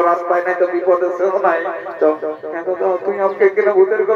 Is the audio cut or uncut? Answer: uncut